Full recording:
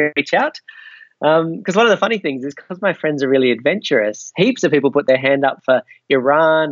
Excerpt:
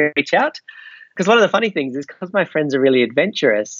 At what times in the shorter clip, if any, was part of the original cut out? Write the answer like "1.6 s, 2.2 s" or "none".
1.1 s